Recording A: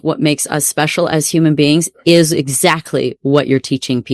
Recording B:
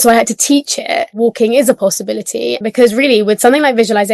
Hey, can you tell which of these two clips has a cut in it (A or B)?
B